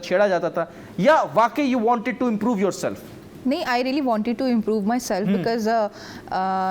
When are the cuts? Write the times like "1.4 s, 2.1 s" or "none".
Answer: none